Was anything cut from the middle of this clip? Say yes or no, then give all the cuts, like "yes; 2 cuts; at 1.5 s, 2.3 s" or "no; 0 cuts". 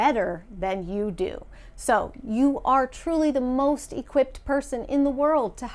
no; 0 cuts